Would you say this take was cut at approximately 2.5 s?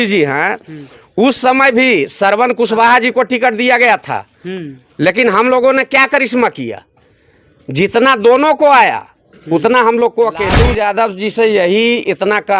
no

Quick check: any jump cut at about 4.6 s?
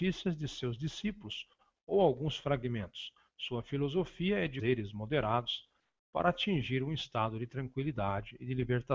no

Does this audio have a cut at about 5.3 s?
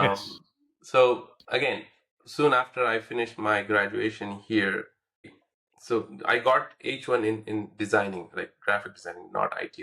yes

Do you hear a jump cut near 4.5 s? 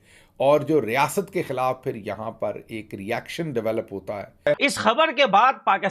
yes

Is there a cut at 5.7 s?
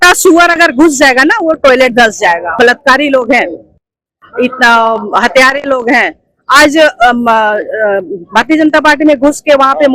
no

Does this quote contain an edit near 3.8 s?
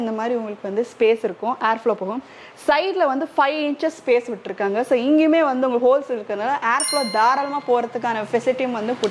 no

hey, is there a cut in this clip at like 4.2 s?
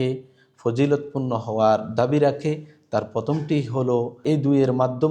yes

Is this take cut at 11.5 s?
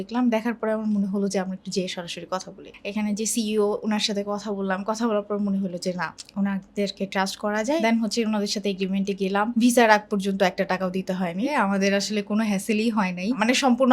yes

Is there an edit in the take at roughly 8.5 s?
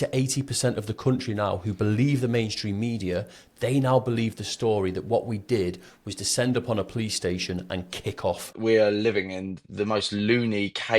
yes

